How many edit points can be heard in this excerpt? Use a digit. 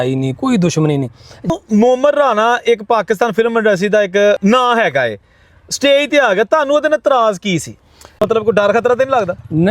3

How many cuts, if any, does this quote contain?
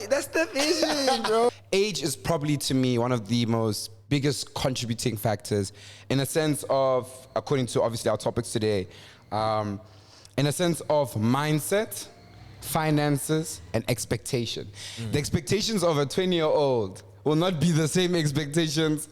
1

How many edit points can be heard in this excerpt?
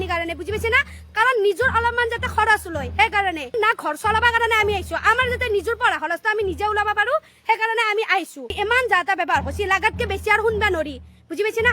2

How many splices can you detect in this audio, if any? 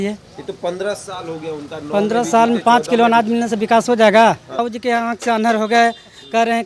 1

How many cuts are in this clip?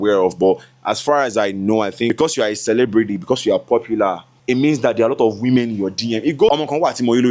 3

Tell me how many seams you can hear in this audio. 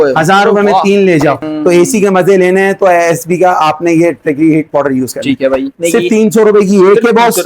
2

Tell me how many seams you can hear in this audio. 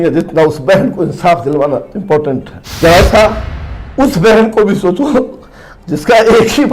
1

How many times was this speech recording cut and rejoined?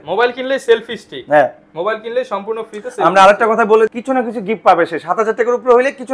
1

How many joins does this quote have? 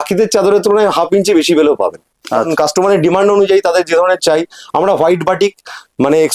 1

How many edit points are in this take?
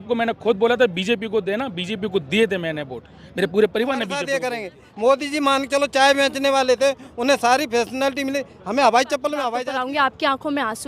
2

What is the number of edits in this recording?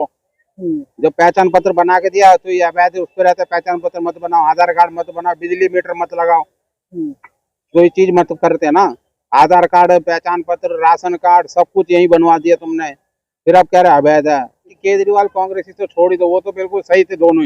1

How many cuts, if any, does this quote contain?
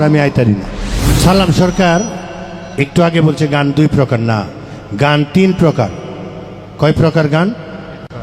1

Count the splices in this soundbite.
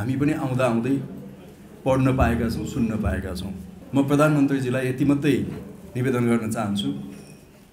1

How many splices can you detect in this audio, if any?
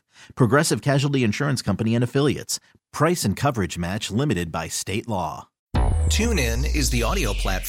1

